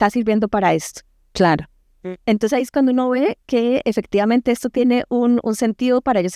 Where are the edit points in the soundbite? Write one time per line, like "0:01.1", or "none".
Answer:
none